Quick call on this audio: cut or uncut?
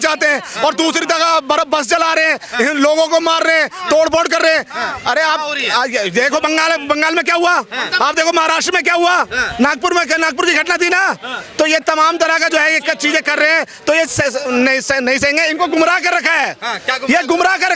uncut